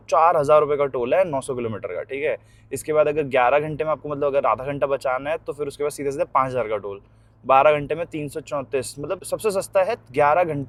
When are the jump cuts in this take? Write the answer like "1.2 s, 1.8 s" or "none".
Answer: none